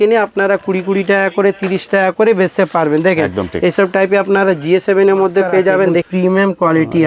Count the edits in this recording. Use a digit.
1